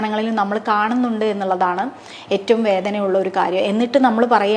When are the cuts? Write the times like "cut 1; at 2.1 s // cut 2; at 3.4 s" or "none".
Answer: none